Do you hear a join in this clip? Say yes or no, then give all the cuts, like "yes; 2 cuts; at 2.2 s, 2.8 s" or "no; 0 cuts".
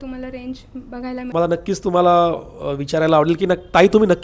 yes; 1 cut; at 1.3 s